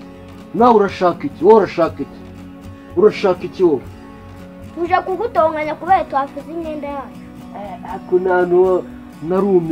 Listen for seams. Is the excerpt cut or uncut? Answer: uncut